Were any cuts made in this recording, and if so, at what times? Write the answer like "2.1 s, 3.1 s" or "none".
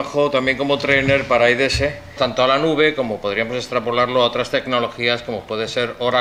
none